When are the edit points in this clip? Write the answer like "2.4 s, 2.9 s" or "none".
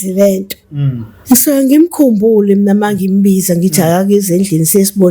1.1 s